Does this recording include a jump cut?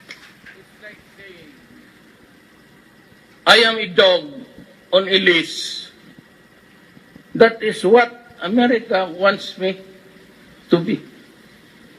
yes; 1 cut; at 4.4 s

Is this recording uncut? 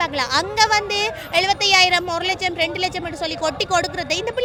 yes; 0 cuts

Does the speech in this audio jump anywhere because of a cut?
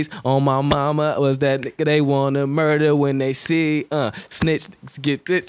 no; 0 cuts

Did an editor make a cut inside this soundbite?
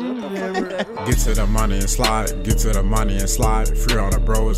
yes; 1 cut; at 0.9 s

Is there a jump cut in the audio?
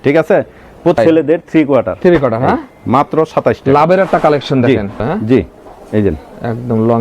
yes; 2 cuts; at 1.0 s, 5.0 s

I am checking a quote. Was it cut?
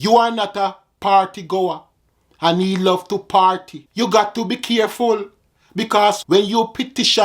yes; 2 cuts; at 3.8 s, 6.2 s

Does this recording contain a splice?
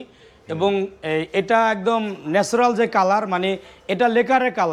no; 0 cuts

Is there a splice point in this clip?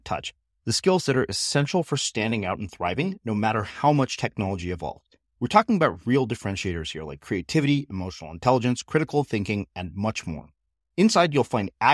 no; 0 cuts

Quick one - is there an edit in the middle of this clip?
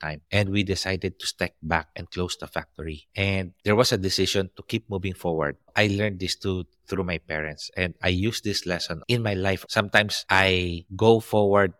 yes; 2 cuts; at 5.7 s, 9.0 s

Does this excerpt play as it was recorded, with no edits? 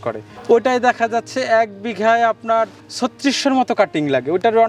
yes; 0 cuts

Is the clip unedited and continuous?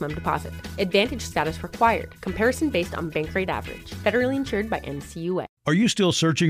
no; 1 cut; at 5.5 s

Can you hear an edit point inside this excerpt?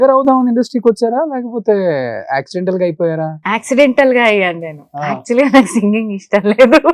no; 0 cuts

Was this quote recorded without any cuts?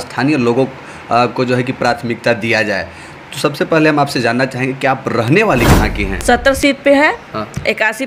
no; 1 cut; at 6.1 s

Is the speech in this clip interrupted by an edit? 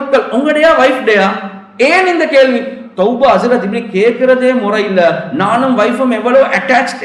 no; 0 cuts

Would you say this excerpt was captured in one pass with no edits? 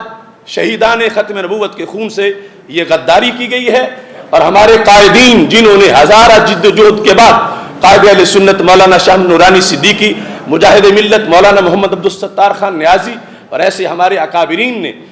yes; 0 cuts

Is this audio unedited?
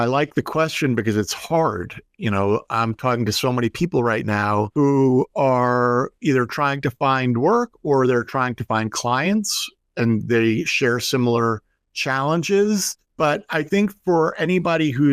no; 2 cuts; at 4.7 s, 13.0 s

